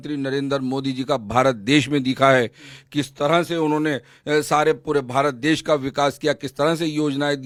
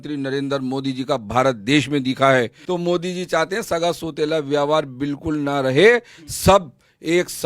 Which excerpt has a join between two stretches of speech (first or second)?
second